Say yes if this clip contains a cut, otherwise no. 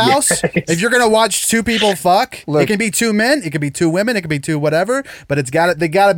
no